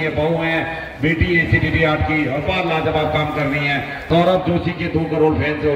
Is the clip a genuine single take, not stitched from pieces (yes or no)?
no